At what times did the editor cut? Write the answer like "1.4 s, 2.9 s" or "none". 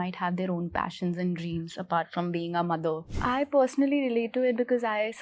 3.1 s